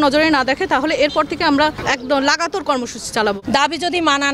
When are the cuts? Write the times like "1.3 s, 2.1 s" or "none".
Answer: 1.8 s, 3.4 s